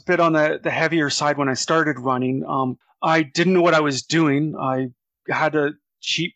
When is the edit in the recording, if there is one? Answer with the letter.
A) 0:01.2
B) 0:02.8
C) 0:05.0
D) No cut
B